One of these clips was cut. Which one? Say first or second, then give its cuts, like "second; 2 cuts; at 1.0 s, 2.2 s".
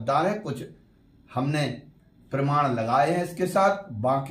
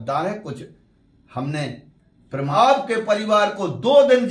second; 1 cut; at 2.6 s